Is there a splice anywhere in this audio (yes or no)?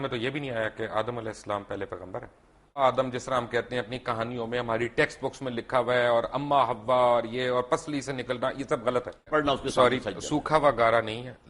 yes